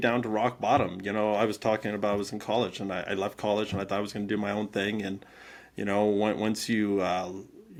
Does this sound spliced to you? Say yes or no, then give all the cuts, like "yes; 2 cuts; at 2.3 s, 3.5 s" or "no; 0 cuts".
no; 0 cuts